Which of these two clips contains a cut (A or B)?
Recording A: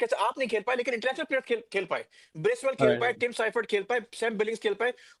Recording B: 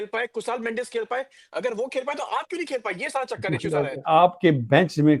B